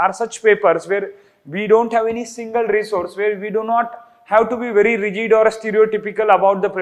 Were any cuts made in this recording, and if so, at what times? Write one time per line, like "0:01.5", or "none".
none